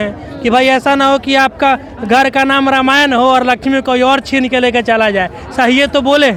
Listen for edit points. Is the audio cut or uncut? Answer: uncut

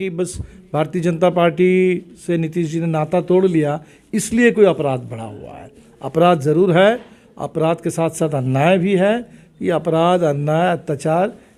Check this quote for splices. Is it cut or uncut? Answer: uncut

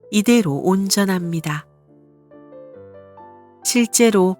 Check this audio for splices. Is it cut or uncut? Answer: cut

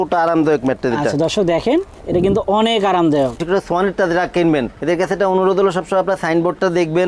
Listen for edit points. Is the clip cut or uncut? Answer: cut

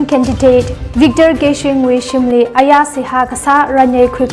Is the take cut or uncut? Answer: uncut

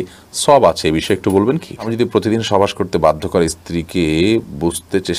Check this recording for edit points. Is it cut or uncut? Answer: cut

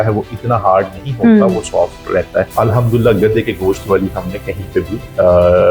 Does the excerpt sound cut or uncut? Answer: cut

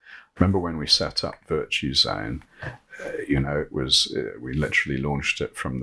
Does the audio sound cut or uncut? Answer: cut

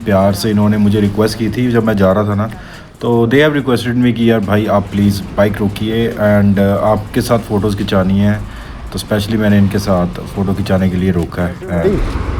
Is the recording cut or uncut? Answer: uncut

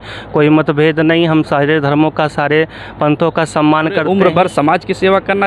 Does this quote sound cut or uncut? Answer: cut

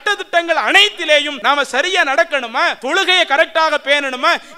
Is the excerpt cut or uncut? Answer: cut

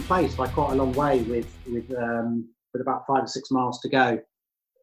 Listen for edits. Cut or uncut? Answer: uncut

